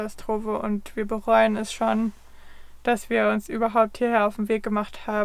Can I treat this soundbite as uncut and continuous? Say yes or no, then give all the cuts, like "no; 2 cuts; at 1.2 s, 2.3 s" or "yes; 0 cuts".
yes; 0 cuts